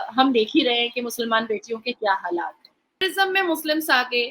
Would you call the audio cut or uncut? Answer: cut